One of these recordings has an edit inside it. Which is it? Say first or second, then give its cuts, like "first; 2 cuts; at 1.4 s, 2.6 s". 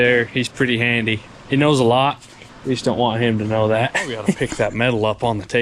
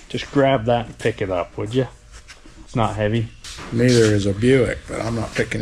first; 2 cuts; at 1.3 s, 4.4 s